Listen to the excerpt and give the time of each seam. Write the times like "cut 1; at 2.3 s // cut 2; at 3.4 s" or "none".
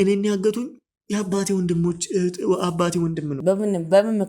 cut 1; at 3.3 s